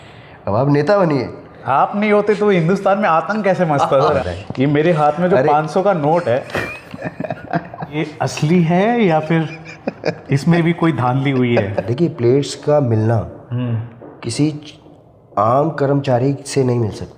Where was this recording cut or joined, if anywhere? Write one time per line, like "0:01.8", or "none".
0:01.6
0:04.2
0:07.9
0:11.9